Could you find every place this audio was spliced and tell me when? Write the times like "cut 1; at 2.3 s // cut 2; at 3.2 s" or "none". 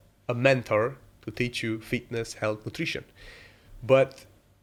none